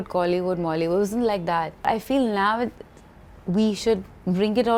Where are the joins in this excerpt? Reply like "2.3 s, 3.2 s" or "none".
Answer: none